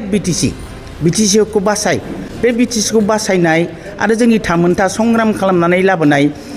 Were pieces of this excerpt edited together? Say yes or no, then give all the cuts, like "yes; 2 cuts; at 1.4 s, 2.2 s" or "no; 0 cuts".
no; 0 cuts